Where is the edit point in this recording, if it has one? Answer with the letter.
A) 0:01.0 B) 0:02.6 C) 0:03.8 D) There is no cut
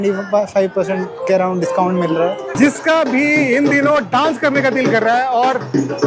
B